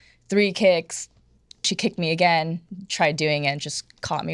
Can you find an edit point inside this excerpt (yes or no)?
yes